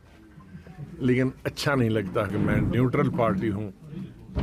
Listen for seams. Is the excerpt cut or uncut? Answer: cut